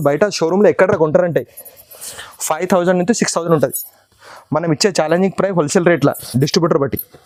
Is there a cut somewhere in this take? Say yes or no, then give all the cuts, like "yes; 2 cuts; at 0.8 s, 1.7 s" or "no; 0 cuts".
no; 0 cuts